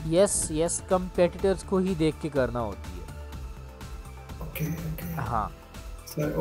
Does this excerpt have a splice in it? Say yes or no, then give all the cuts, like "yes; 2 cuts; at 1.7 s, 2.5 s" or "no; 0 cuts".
no; 0 cuts